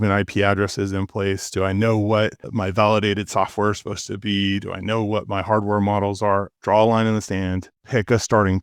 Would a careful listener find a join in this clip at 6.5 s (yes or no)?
yes